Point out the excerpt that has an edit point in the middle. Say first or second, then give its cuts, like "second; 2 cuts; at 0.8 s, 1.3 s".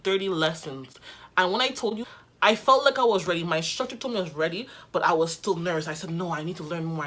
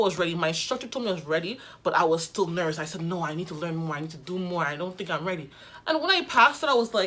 first; 1 cut; at 2.0 s